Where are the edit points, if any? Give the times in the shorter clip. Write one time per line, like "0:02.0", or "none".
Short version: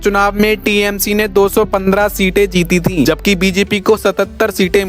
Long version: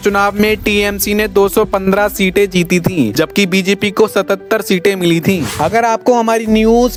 0:03.0